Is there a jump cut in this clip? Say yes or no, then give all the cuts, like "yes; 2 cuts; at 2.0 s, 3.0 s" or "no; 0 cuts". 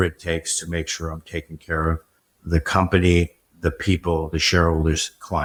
no; 0 cuts